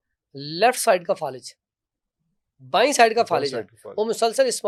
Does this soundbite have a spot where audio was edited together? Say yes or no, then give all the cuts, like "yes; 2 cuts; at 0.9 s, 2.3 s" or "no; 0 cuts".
no; 0 cuts